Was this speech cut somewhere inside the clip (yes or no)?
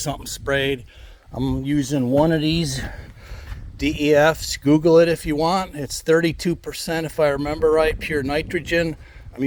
no